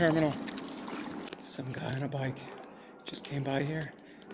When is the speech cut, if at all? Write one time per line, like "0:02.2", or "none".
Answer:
0:01.3